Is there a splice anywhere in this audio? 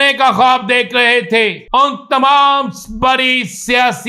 yes; 1 cut; at 1.6 s

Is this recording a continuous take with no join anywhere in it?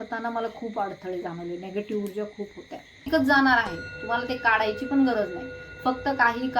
no; 1 cut; at 3.1 s

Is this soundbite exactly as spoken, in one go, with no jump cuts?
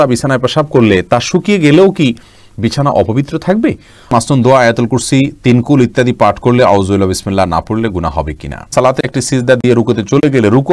no; 2 cuts; at 4.0 s, 8.7 s

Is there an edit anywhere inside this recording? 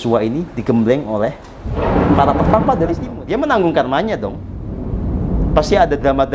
yes; 1 cut; at 3.1 s

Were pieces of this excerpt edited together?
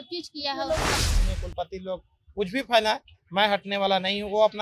yes; 1 cut; at 1.0 s

